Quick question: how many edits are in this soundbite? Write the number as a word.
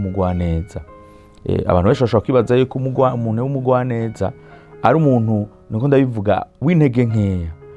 zero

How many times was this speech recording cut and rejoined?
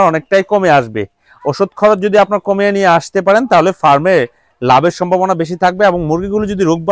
zero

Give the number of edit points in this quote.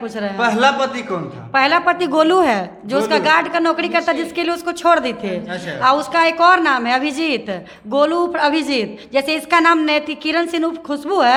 zero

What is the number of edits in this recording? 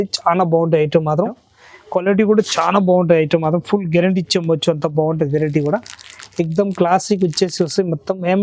one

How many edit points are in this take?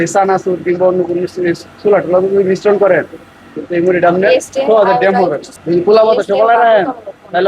one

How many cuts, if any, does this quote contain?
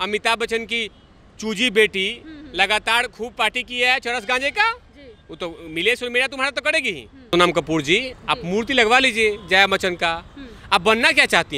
one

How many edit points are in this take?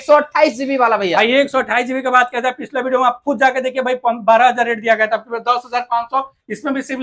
zero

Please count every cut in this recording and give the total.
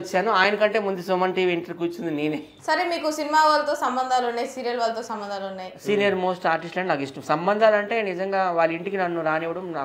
one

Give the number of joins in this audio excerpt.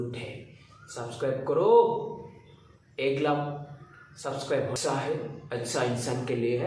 one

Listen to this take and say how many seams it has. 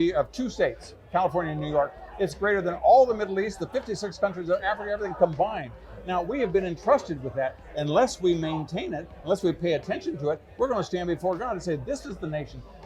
zero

